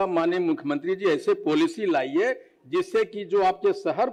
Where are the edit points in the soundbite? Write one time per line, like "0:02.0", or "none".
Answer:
none